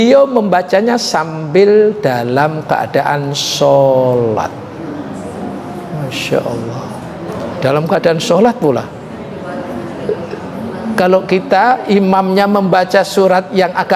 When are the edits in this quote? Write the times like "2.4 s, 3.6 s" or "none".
7.4 s